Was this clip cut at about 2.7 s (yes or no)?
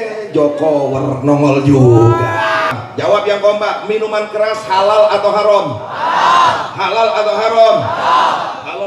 yes